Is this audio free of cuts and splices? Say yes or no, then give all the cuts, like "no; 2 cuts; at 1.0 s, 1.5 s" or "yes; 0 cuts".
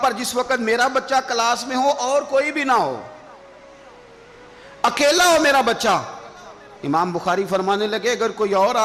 yes; 0 cuts